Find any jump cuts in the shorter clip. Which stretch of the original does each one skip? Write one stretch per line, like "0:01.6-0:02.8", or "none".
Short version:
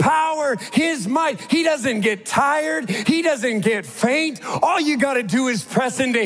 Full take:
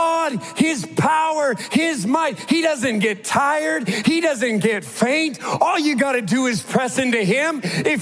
none